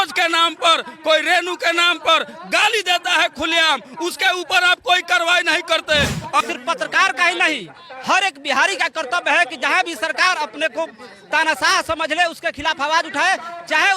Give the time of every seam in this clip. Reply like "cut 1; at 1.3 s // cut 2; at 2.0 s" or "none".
cut 1; at 6.4 s